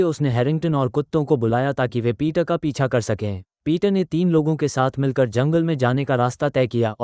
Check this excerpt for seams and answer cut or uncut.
uncut